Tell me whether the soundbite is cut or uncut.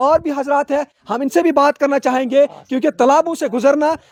uncut